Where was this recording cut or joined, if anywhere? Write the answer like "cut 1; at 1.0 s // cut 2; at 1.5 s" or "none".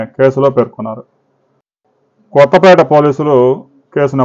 cut 1; at 2.1 s